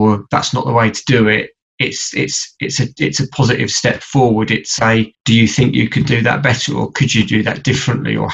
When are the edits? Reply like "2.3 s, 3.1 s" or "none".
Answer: none